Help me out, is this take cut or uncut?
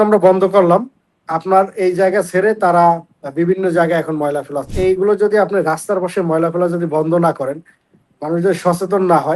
cut